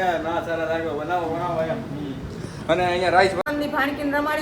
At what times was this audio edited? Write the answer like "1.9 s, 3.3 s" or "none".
3.4 s